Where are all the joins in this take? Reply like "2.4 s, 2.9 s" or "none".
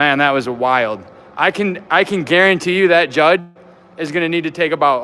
none

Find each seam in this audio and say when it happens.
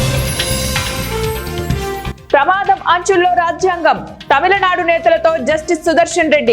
2.0 s

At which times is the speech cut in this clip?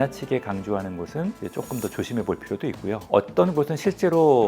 3.0 s

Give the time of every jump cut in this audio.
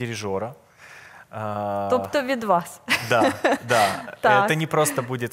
none

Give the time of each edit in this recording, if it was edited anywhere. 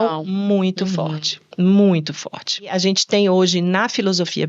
2.7 s

